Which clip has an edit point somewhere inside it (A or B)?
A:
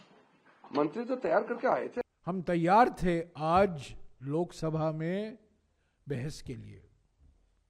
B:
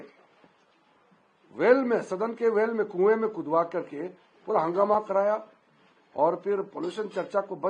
A